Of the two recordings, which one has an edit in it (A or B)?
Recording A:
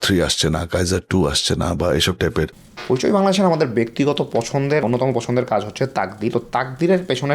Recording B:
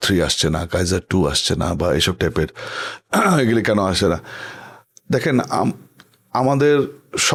A